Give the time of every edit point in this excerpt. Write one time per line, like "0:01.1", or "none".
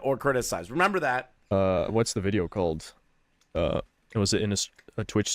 0:01.3